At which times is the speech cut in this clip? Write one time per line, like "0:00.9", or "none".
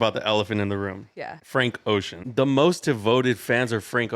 0:01.4
0:02.2

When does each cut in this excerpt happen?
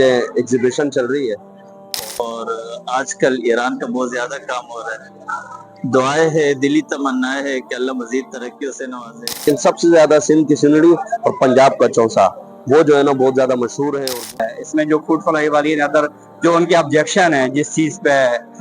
0:02.0
0:09.4
0:14.0

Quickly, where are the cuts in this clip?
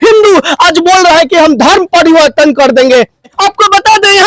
0:03.3

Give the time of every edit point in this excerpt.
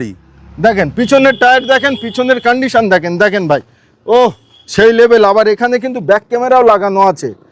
none

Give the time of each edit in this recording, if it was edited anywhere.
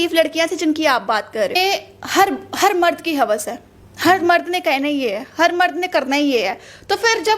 0:01.6

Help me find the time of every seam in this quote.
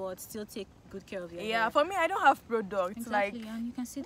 none

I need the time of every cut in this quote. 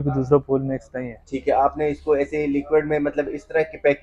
none

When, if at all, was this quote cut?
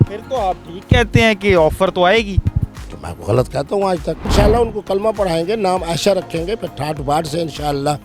0:04.3

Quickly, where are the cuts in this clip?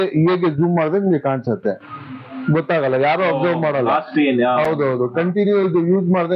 none

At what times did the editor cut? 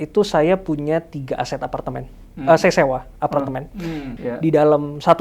0:04.1

